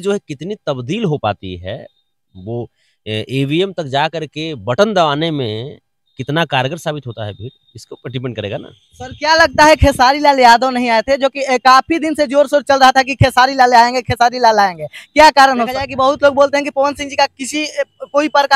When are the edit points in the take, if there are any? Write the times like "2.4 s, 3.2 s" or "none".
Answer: 15.8 s